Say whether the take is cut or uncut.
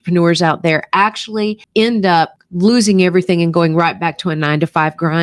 uncut